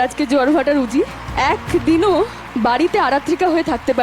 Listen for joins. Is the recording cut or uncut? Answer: cut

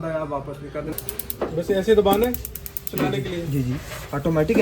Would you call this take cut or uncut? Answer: cut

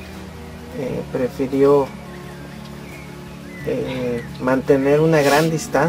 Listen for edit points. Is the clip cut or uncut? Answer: cut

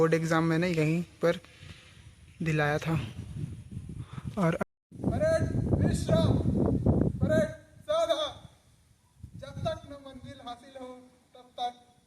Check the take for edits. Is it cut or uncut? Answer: cut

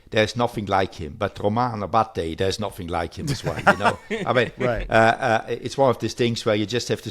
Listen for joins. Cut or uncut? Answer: uncut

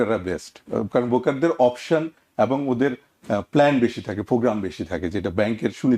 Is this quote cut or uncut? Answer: uncut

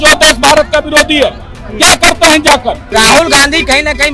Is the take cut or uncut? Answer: cut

